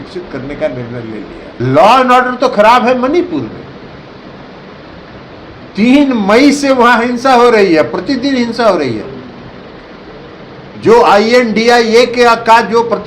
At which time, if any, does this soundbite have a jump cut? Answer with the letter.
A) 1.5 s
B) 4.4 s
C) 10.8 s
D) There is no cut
A